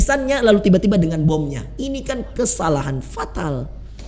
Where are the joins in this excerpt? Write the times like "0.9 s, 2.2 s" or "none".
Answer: none